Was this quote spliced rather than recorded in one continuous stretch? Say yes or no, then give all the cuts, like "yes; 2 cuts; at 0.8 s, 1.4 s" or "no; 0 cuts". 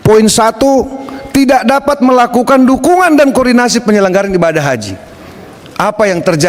no; 0 cuts